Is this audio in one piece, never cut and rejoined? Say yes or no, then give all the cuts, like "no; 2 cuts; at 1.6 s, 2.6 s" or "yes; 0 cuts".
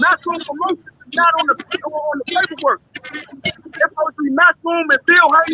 yes; 0 cuts